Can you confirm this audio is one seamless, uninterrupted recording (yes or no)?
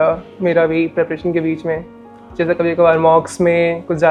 yes